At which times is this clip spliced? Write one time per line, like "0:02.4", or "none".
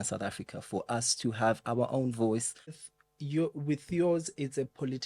0:02.8